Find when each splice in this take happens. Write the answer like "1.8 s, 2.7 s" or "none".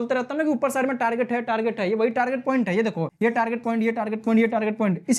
3.1 s